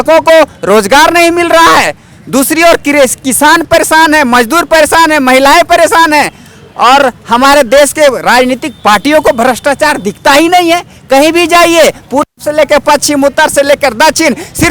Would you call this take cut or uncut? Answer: uncut